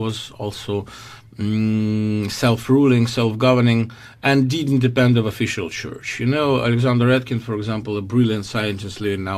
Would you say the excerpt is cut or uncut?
cut